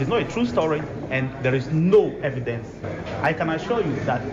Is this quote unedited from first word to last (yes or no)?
no